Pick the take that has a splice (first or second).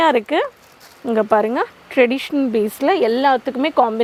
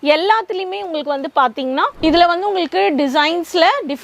second